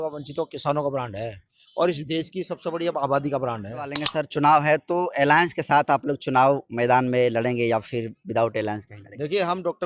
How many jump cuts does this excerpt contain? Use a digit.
1